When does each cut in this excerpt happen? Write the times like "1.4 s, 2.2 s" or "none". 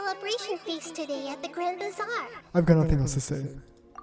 2.3 s